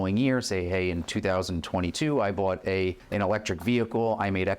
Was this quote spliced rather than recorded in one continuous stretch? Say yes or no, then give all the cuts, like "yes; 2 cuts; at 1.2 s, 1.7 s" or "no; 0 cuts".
yes; 1 cut; at 3.0 s